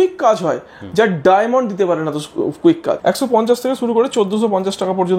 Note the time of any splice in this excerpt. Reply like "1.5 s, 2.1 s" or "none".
3.0 s